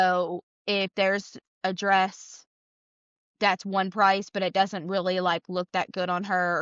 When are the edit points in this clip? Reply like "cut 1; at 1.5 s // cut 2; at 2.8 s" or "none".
none